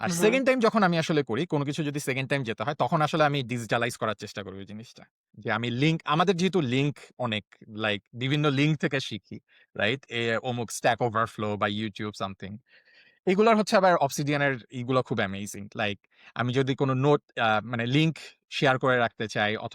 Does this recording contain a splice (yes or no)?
yes